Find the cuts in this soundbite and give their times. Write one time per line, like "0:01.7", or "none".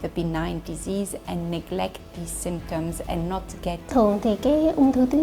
0:03.9